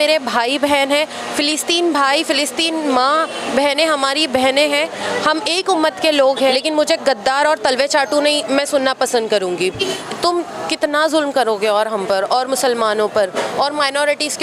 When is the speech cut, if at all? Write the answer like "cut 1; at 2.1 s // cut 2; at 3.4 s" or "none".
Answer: cut 1; at 6.6 s // cut 2; at 10.0 s